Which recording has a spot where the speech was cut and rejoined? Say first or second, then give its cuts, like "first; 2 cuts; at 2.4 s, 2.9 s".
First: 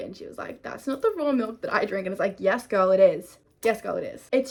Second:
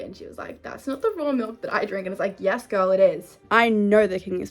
second; 1 cut; at 3.3 s